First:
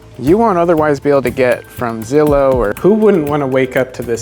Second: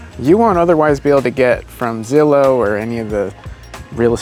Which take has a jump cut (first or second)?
first